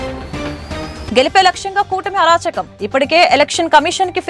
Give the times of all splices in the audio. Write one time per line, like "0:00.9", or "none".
none